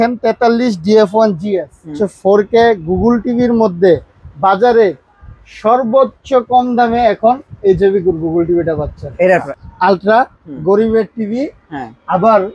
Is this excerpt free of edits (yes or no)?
no